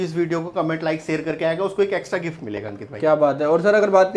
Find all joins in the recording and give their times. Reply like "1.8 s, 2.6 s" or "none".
none